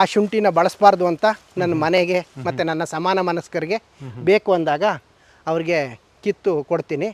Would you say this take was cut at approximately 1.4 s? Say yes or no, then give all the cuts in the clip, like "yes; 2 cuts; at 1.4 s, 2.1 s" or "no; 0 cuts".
no; 0 cuts